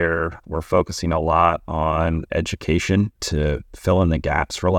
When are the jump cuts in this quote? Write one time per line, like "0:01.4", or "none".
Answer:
none